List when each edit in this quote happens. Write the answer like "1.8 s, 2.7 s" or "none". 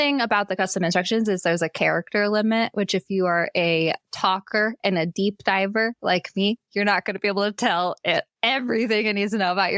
none